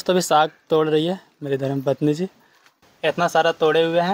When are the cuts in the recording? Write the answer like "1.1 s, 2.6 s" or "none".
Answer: 2.8 s